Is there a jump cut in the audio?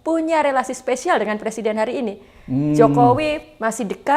no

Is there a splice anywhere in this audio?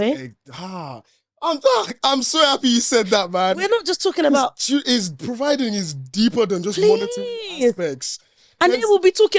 no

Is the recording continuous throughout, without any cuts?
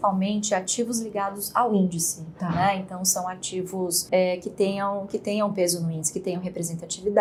yes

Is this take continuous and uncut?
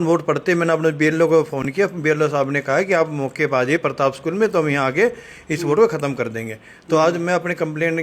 yes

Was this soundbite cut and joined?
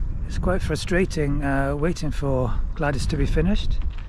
no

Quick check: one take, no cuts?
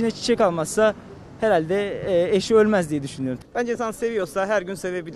no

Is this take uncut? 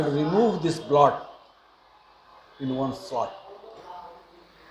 no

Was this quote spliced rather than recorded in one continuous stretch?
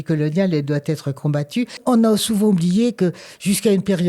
yes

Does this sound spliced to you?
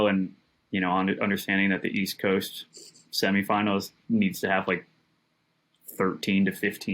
no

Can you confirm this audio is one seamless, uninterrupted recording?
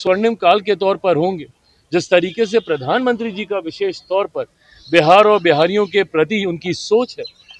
yes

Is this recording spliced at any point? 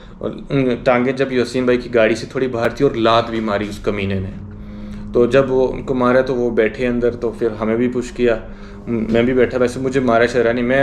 no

